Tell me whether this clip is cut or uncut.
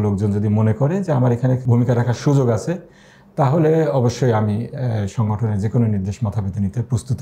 uncut